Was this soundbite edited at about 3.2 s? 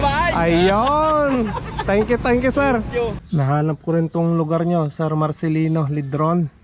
yes; 1 cut; at 3.2 s

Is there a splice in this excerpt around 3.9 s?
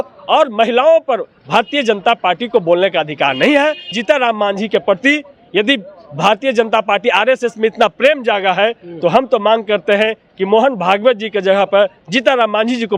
yes; 1 cut; at 3.9 s

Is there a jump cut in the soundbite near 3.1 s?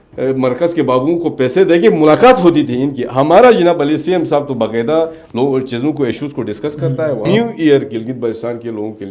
no; 1 cut; at 7.3 s

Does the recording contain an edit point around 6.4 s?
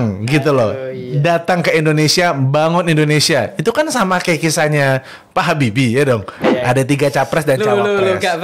yes; 1 cut; at 6.4 s

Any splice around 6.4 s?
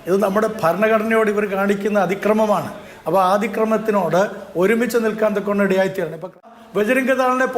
yes; 1 cut; at 6.4 s

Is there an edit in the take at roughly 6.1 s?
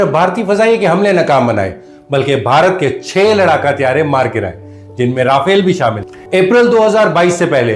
yes; 1 cut; at 6.1 s

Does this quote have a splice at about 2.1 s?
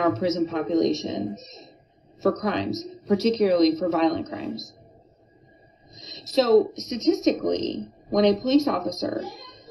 no; 1 cut; at 6.2 s

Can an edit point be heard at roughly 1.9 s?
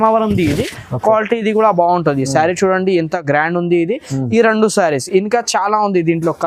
no; 0 cuts

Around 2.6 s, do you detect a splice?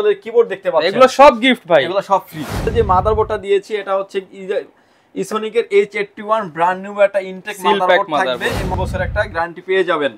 yes; 2 cuts; at 2.6 s, 8.8 s

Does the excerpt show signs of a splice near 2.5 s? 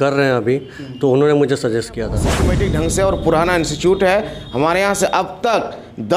yes; 1 cut; at 2.5 s

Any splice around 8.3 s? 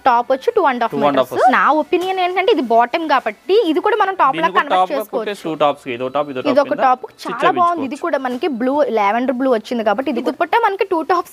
no; 3 cuts; at 1.5 s, 5.4 s, 10.3 s

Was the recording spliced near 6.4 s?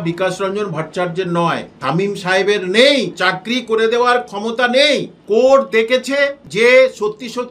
yes; 3 cuts; at 1.7 s, 5.1 s, 6.4 s

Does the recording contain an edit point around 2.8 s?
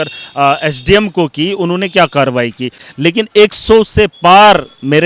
yes; 1 cut; at 2.8 s

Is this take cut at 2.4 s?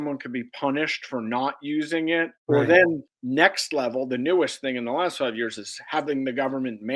yes; 2 cuts; at 2.4 s, 3.1 s

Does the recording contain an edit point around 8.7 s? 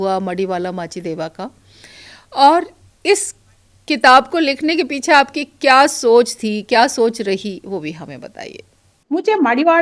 yes; 1 cut; at 8.7 s

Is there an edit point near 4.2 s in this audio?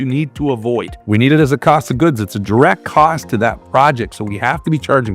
no; 1 cut; at 0.9 s

